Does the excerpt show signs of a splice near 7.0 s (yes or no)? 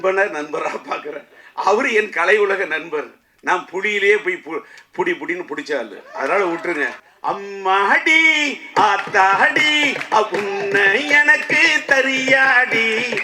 yes